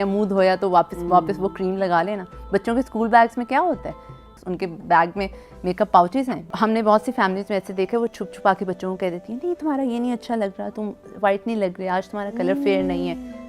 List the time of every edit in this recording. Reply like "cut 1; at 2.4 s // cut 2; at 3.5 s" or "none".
cut 1; at 4.4 s // cut 2; at 6.5 s